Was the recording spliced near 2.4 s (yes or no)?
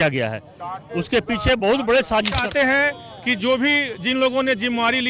yes